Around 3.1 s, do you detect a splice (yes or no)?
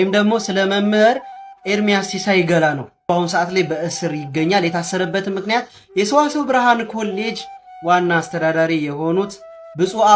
yes